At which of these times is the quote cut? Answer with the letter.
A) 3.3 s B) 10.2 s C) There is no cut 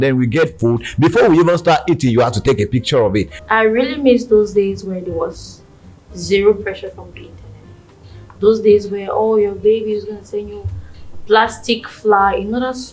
A